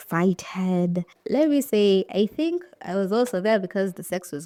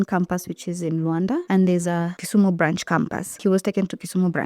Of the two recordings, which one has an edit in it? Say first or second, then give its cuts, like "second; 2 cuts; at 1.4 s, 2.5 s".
second; 3 cuts; at 1.4 s, 2.2 s, 3.4 s